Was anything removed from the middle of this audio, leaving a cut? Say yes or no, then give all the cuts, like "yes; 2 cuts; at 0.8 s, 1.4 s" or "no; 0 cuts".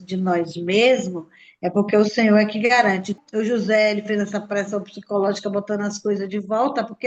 yes; 1 cut; at 3.1 s